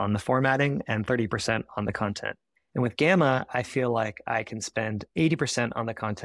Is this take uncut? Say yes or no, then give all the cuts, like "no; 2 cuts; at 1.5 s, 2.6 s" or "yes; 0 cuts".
yes; 0 cuts